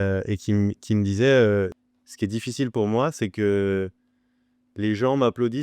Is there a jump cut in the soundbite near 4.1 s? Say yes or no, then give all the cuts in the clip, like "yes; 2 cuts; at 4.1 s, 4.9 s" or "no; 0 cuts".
no; 1 cut; at 1.8 s